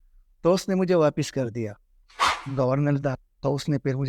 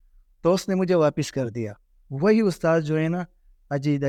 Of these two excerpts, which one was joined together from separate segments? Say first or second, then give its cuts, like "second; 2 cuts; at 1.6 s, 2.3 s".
first; 1 cut; at 2.0 s